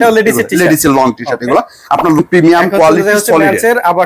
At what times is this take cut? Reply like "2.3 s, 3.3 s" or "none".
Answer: 2.2 s